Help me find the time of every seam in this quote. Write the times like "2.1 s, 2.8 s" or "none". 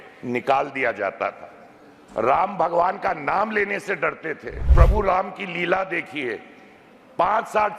4.7 s